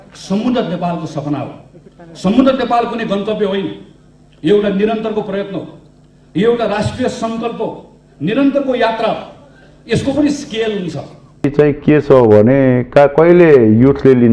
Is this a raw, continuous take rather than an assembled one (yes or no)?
no